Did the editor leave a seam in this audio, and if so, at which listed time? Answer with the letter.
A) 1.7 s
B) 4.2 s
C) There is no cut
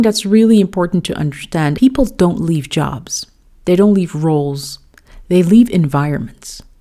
A